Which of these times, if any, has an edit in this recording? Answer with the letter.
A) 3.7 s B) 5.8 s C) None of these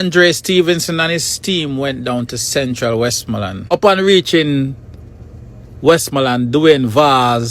A